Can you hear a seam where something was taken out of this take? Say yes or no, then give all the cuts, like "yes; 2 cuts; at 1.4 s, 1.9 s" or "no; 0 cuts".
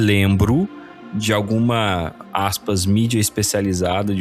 no; 0 cuts